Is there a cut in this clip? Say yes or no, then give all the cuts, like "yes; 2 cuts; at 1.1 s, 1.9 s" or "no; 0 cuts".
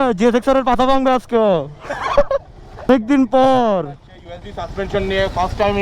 yes; 1 cut; at 2.9 s